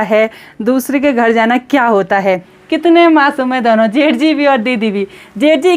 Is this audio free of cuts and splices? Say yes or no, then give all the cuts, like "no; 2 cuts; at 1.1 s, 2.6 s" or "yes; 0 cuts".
no; 1 cut; at 2.5 s